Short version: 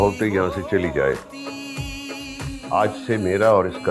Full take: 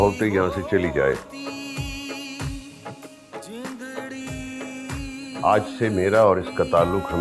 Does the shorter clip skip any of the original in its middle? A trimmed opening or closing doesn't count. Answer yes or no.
yes